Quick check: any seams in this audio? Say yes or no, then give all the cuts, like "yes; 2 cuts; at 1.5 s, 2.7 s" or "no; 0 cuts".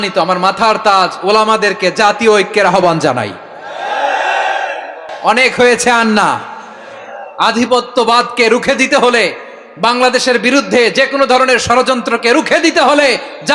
yes; 1 cut; at 5.1 s